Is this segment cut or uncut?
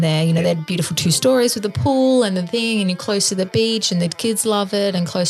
uncut